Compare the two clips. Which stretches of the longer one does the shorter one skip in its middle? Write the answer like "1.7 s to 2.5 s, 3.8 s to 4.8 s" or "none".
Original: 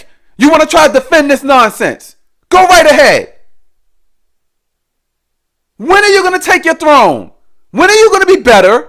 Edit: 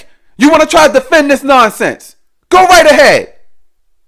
none